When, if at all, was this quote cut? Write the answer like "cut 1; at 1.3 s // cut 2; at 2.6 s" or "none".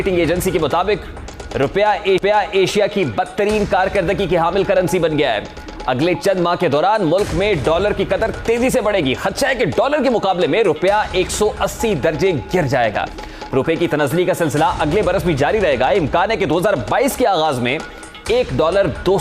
none